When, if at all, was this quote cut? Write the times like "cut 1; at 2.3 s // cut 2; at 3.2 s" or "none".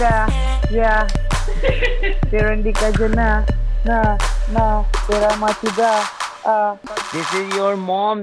cut 1; at 6.9 s